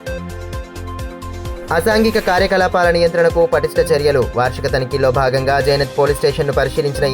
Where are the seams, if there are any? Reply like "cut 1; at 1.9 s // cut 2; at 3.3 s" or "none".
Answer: none